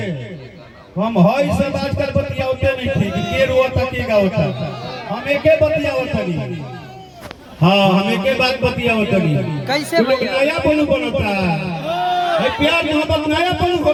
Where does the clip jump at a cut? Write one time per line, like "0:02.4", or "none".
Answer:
none